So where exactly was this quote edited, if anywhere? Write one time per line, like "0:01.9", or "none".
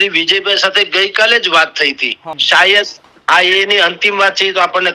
0:02.3